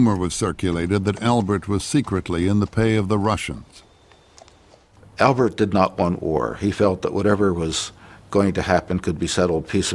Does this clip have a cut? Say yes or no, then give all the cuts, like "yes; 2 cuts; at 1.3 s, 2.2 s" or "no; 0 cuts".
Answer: yes; 1 cut; at 4.4 s